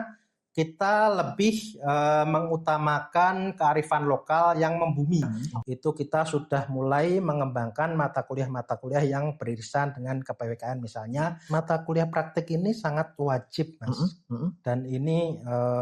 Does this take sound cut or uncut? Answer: cut